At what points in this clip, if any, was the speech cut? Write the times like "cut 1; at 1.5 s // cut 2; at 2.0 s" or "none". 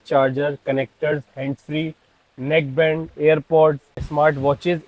none